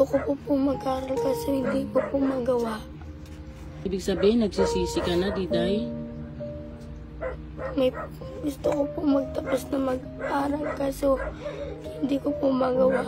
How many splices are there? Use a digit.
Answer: 1